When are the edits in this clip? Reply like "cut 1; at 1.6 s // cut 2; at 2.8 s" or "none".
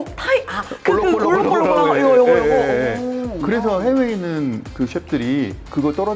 cut 1; at 3.3 s